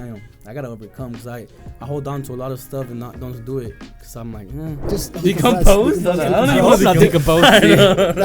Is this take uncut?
no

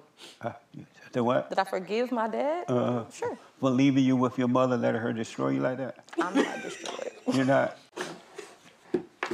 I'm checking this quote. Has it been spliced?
yes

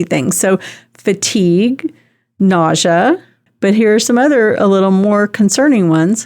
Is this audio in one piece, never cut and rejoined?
no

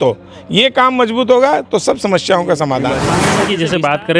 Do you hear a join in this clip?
yes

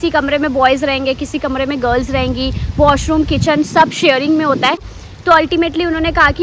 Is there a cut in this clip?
yes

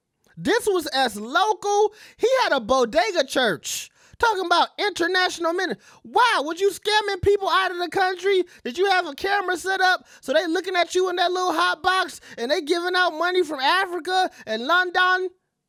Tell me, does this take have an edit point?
no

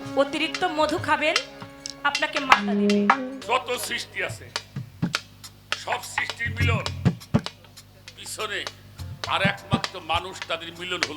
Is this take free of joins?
no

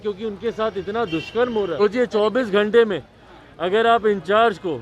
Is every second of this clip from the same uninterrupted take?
no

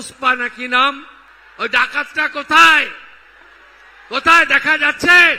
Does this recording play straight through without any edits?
yes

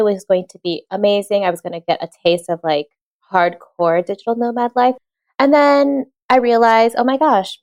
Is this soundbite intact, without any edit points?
no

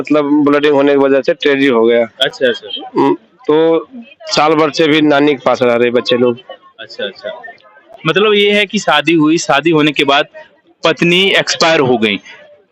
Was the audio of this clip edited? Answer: no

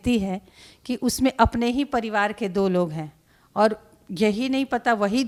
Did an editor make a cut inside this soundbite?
no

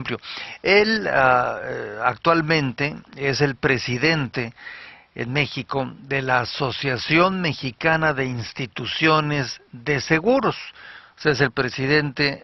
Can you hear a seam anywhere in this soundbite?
yes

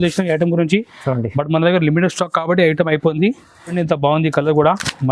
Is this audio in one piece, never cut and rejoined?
no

